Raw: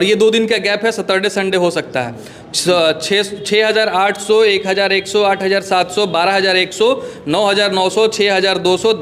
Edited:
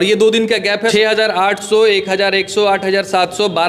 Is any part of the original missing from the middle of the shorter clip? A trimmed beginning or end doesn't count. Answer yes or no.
yes